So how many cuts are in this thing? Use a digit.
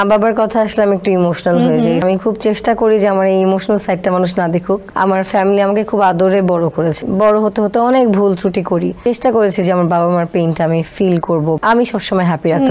5